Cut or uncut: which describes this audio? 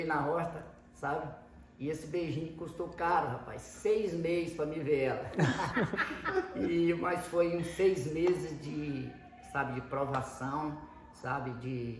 uncut